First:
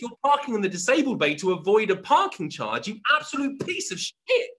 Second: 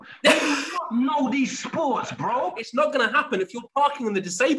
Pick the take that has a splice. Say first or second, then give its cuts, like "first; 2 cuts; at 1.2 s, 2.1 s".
second; 1 cut; at 2.6 s